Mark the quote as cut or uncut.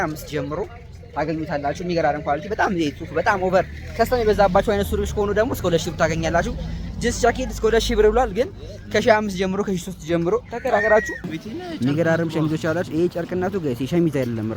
cut